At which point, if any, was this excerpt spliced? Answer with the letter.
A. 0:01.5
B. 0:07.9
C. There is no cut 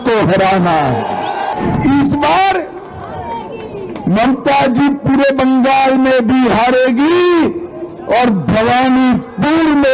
A